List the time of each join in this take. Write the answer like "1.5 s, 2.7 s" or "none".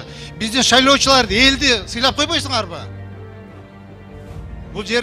none